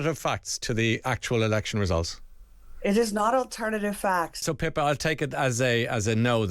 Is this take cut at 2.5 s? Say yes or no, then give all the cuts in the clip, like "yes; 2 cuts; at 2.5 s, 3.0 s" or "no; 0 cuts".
no; 1 cut; at 4.4 s